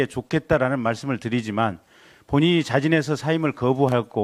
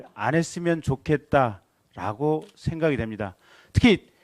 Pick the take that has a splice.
second; 1 cut; at 3.0 s

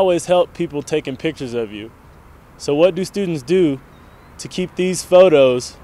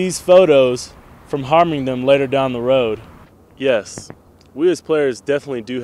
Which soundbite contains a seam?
second; 1 cut; at 3.3 s

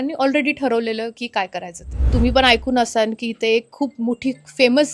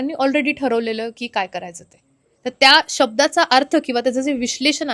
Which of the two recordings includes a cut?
first; 1 cut; at 1.9 s

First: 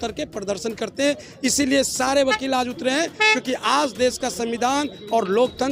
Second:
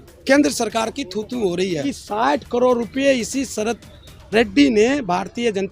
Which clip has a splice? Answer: second; 1 cut; at 2.0 s

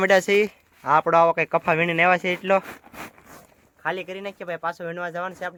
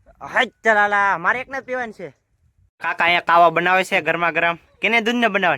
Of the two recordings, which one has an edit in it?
second; 1 cut; at 2.7 s

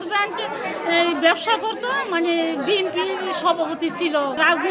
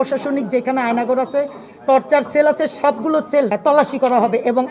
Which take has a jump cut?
second; 1 cut; at 3.6 s

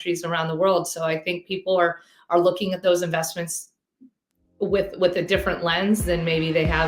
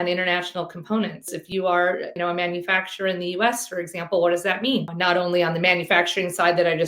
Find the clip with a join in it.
second; 3 cuts; at 1.3 s, 2.1 s, 4.9 s

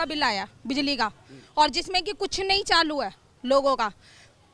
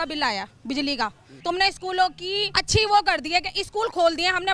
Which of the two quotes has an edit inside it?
second; 2 cuts; at 1.3 s, 2.5 s

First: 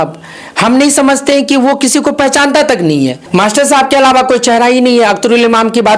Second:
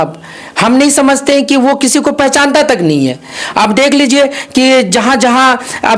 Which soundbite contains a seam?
first; 1 cut; at 3.2 s

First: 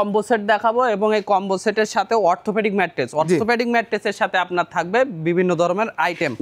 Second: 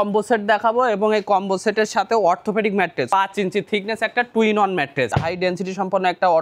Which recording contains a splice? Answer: second; 2 cuts; at 3.1 s, 5.1 s

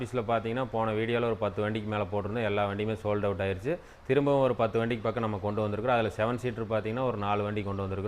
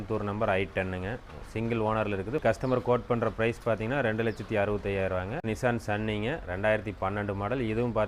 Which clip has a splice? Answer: second; 2 cuts; at 2.4 s, 5.4 s

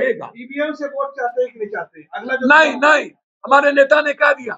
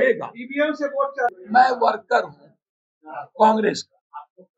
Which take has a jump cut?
second; 1 cut; at 1.3 s

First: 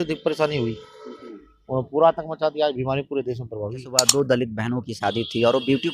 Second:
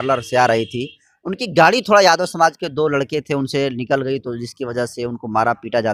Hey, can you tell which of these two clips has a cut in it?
first; 1 cut; at 3.9 s

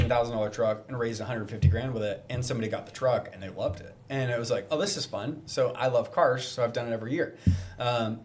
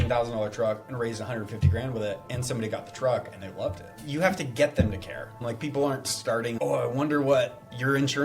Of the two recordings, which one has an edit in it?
second; 3 cuts; at 4.0 s, 5.4 s, 6.6 s

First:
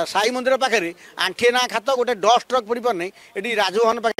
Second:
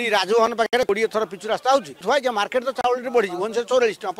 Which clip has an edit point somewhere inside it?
second; 1 cut; at 1.9 s

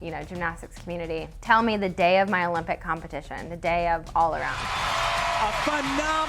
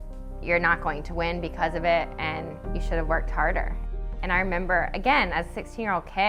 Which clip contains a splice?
first; 2 cuts; at 1.3 s, 4.6 s

